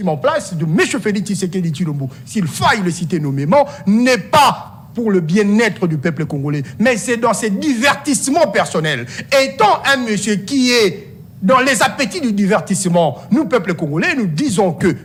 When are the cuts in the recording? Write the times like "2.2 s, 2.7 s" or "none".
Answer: none